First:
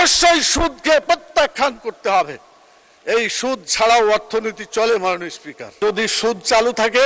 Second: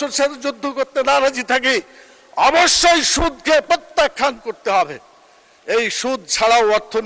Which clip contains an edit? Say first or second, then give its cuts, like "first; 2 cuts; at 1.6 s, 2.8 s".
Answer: first; 1 cut; at 5.8 s